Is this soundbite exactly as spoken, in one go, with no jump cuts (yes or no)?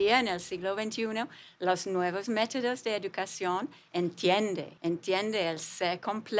no